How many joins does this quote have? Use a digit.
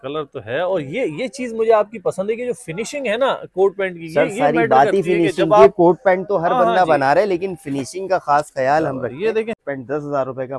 1